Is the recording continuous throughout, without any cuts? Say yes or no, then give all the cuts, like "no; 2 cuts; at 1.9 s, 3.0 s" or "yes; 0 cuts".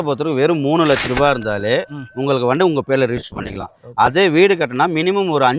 yes; 0 cuts